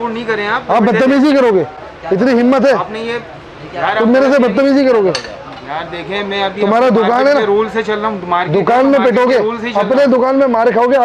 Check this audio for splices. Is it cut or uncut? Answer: uncut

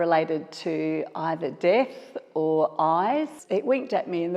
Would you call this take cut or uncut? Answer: cut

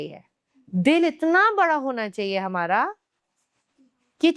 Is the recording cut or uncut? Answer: uncut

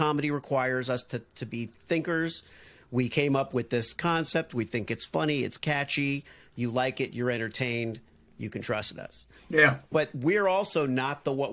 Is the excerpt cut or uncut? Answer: uncut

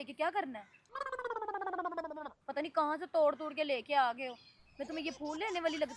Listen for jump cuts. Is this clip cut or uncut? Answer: uncut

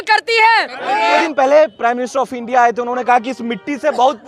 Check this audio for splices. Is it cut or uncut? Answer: cut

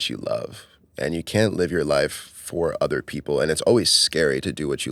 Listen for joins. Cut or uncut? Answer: uncut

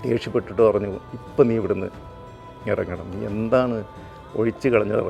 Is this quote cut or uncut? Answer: uncut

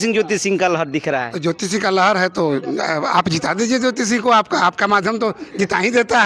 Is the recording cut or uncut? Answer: uncut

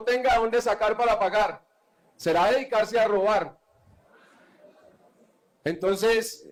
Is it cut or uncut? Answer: uncut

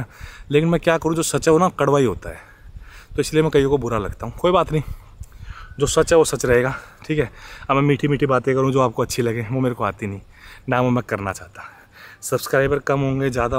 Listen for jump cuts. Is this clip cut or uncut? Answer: uncut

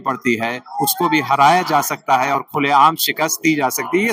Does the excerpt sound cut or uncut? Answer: uncut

